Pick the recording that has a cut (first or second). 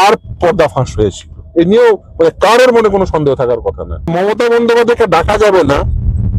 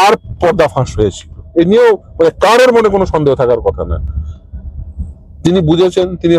first